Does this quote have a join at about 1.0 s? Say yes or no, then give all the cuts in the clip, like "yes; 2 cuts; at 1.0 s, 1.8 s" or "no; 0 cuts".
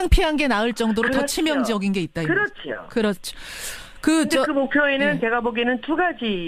no; 0 cuts